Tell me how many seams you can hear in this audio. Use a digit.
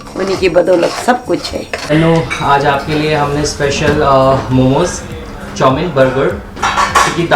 1